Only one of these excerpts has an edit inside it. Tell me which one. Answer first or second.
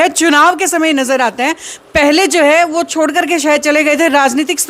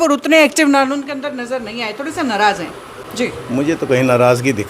second